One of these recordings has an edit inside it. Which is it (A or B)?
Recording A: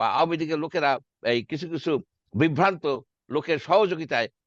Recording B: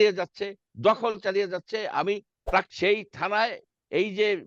B